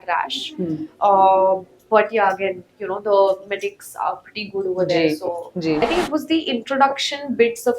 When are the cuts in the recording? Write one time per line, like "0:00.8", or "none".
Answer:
0:05.8